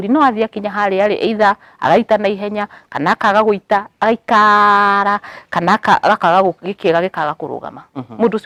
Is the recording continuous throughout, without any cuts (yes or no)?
yes